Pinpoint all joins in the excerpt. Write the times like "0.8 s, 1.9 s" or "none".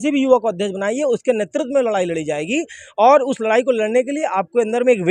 none